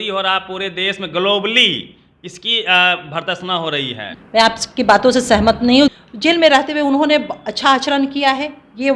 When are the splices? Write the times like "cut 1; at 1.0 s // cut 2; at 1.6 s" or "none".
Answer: cut 1; at 4.1 s // cut 2; at 5.9 s